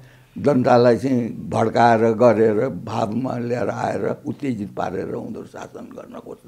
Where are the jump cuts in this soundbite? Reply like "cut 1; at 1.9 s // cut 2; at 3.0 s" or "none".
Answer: none